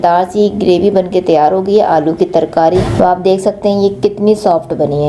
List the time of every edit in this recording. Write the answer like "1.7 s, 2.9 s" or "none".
2.8 s